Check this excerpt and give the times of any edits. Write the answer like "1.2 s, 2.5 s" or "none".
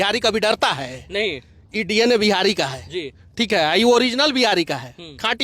none